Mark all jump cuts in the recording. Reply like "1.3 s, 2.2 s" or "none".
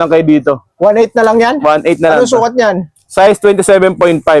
none